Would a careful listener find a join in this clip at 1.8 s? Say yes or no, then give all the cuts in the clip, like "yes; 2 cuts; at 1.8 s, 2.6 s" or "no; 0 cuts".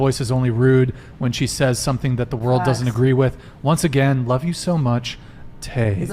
no; 1 cut; at 4.3 s